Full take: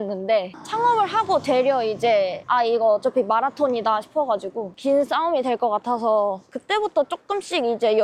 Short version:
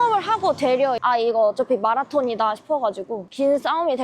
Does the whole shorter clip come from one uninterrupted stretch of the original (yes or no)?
no